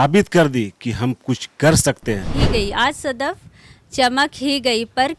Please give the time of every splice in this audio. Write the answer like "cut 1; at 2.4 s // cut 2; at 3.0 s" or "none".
cut 1; at 2.3 s